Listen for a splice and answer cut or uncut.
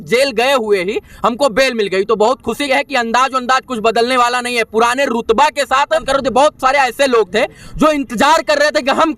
cut